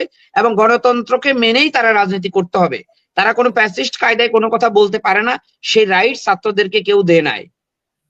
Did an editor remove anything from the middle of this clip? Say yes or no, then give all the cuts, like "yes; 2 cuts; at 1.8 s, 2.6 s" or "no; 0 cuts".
no; 0 cuts